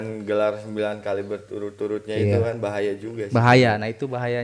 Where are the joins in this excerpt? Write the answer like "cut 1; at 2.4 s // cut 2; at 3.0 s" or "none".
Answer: none